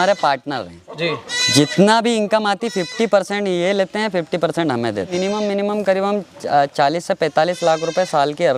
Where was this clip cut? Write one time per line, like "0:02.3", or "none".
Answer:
0:01.3
0:05.1

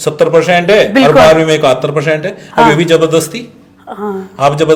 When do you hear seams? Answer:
none

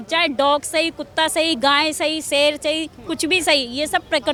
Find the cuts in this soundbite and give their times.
none

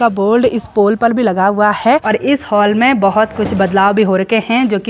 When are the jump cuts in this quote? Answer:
0:02.0

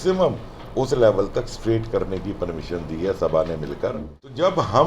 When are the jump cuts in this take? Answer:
0:03.7

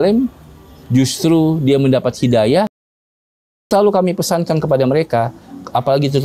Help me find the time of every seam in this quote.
0:03.1

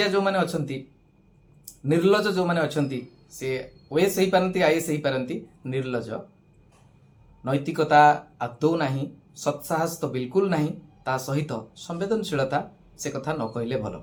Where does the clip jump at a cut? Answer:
none

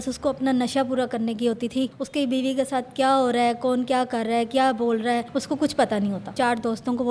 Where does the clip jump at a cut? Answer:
0:02.0
0:05.3
0:06.3

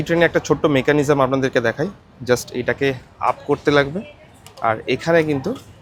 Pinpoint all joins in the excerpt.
none

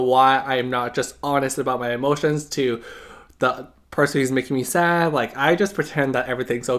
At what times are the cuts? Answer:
none

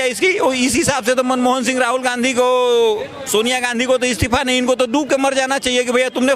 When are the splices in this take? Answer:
none

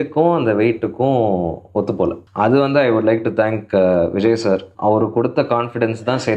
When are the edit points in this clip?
0:02.2
0:04.7

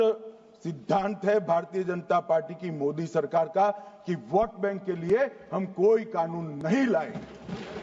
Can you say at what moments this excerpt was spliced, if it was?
none

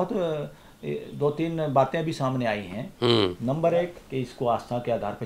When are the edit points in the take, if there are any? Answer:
0:04.0

